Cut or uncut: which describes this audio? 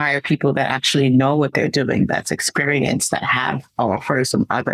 uncut